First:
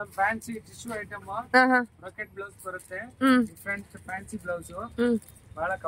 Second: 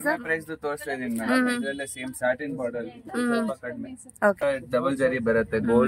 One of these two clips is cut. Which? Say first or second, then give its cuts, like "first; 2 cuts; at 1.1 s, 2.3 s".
second; 1 cut; at 4.4 s